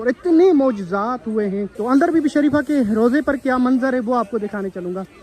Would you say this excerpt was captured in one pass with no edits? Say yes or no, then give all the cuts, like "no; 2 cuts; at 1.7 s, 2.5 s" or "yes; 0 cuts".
no; 1 cut; at 1.7 s